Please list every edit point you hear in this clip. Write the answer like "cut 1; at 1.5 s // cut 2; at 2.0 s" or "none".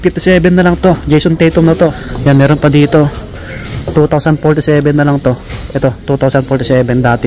cut 1; at 2.1 s